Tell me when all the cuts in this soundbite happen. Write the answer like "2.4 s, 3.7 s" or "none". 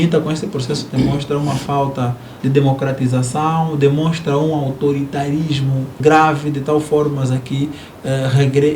2.3 s, 5.9 s

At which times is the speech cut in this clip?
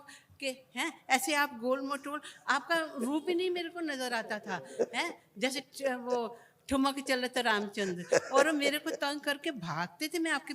none

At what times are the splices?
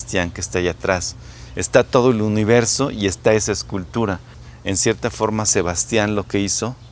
4.4 s

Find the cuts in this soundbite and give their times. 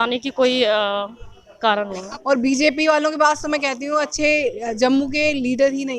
2.1 s

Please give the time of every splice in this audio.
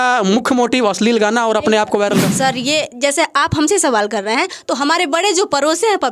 2.3 s

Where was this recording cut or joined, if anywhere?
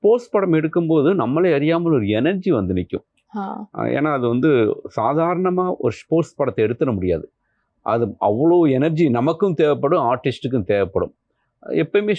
none

